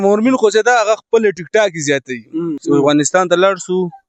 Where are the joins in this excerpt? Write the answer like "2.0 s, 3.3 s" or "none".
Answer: 2.6 s

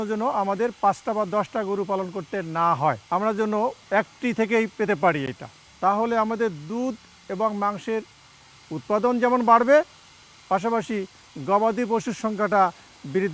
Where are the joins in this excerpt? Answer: none

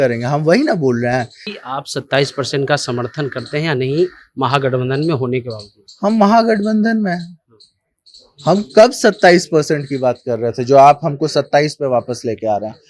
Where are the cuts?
1.4 s

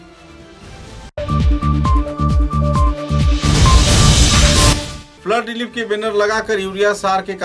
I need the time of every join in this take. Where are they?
none

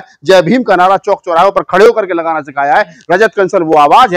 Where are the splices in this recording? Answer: none

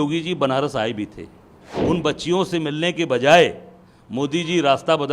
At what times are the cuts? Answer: 1.7 s

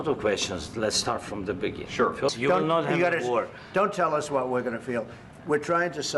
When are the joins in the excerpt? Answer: 2.4 s

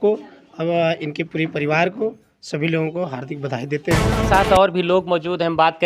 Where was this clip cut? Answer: 4.2 s

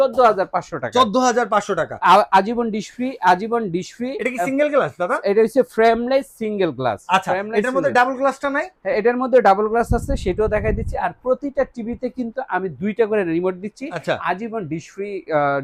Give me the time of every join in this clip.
none

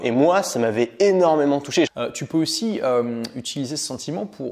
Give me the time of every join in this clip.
2.0 s

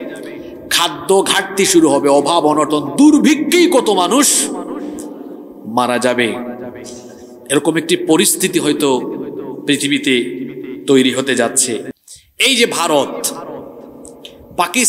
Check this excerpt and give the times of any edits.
11.8 s

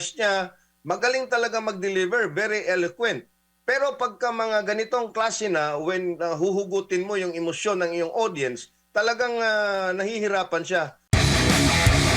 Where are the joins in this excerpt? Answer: 11.0 s

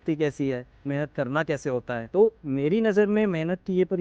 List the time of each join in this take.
2.0 s

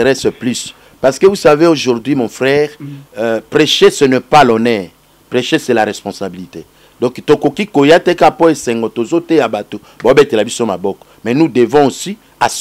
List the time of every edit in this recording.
none

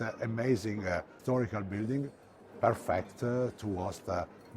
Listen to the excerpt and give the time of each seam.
1.1 s

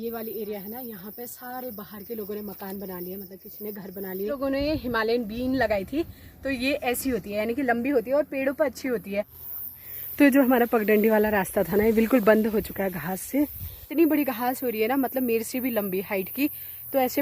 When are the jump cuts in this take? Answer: 4.4 s, 9.4 s, 13.8 s

